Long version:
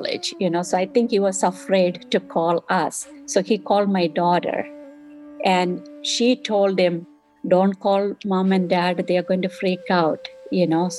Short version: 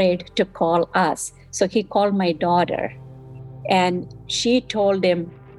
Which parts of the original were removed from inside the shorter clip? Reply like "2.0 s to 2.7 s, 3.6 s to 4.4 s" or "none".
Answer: none